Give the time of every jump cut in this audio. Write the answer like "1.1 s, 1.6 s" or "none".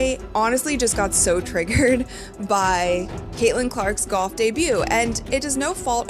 2.2 s